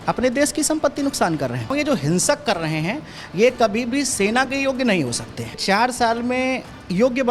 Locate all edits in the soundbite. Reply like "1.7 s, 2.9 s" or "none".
1.7 s, 5.6 s